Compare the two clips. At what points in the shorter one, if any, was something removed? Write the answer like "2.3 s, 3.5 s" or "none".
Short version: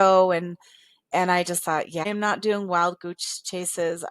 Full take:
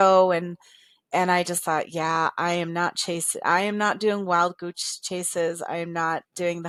2.0 s